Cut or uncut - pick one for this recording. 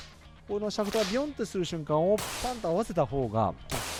uncut